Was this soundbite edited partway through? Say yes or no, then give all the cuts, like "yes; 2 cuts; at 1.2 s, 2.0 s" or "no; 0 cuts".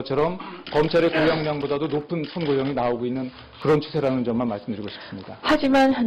no; 0 cuts